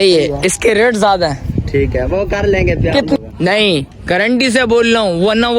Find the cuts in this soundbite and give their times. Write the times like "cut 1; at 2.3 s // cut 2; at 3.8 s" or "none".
cut 1; at 3.2 s